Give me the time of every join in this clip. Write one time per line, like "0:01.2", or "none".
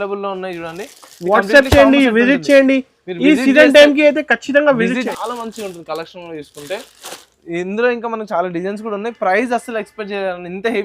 0:05.1